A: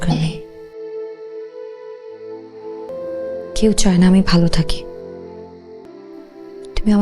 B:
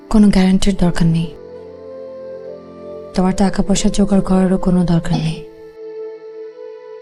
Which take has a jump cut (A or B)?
A